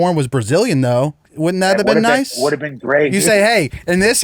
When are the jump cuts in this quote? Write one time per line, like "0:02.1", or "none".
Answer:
0:01.3
0:03.1